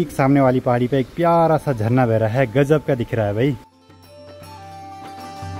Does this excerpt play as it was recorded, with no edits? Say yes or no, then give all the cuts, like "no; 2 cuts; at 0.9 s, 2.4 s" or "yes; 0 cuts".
yes; 0 cuts